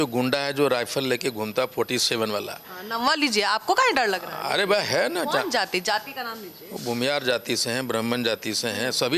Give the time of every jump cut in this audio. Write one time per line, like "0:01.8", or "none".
none